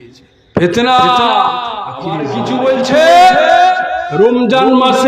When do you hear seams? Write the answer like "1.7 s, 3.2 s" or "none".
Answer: 2.2 s